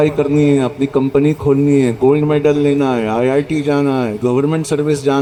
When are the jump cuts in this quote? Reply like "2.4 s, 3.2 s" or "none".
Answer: none